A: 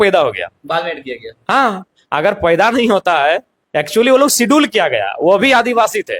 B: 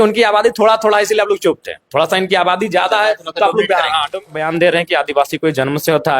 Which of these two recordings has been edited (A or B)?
B